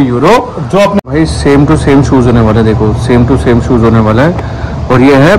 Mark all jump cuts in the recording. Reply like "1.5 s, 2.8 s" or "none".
1.1 s